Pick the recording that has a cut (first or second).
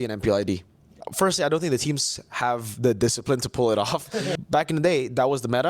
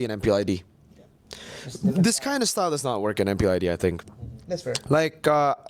first